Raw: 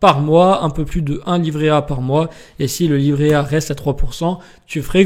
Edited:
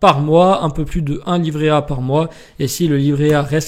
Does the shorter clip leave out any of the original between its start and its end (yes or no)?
no